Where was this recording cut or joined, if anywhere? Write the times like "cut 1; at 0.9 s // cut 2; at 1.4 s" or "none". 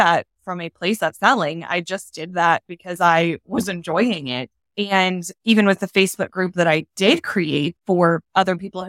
cut 1; at 7.7 s